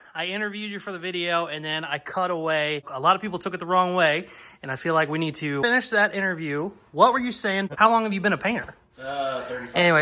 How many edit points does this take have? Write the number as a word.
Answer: three